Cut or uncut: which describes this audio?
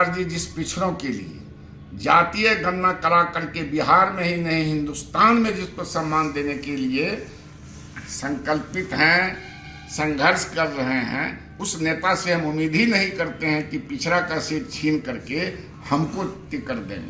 uncut